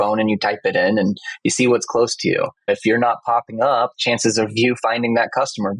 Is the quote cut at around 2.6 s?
yes; 2 cuts; at 2.6 s, 4.0 s

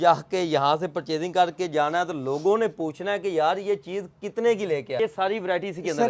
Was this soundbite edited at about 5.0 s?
yes; 1 cut; at 5.0 s

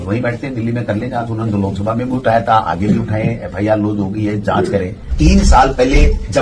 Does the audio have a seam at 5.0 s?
yes; 1 cut; at 5.0 s

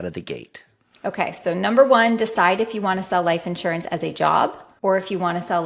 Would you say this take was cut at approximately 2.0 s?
no; 1 cut; at 4.7 s

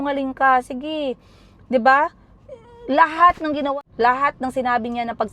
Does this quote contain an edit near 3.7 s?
yes; 1 cut; at 3.7 s

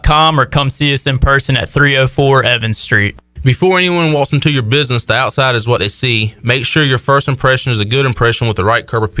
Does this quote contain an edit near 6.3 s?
no; 1 cut; at 3.2 s

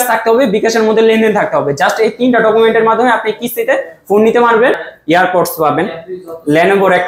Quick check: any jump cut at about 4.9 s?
yes; 1 cut; at 4.9 s

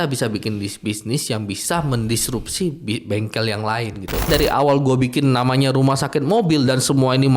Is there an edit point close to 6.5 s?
no; 1 cut; at 4.3 s

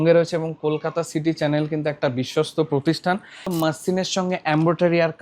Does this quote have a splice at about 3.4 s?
yes; 1 cut; at 3.4 s

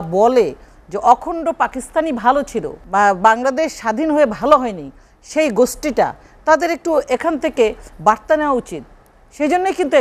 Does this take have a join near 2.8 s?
yes; 1 cut; at 2.8 s

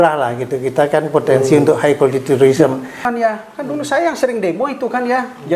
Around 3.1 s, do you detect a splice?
yes; 1 cut; at 3.1 s

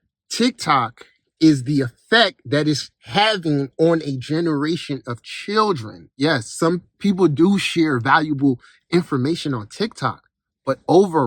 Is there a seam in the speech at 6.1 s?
yes; 1 cut; at 6.1 s

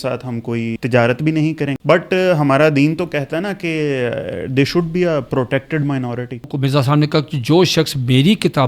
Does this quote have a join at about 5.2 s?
no; 3 cuts; at 0.8 s, 1.8 s, 6.5 s

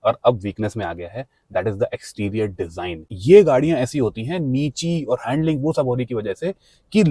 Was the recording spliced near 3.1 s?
yes; 1 cut; at 3.1 s

